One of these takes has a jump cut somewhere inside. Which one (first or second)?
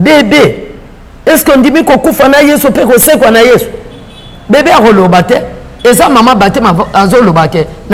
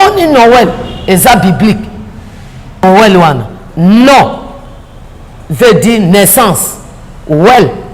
second